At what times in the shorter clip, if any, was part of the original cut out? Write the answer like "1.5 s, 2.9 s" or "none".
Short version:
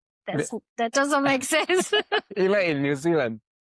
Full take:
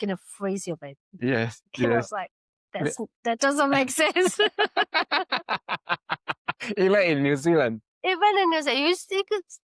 2.2 s